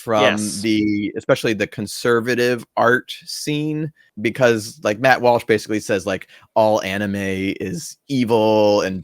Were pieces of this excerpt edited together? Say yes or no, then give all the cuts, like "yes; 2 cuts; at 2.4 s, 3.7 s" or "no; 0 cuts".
yes; 1 cut; at 4.0 s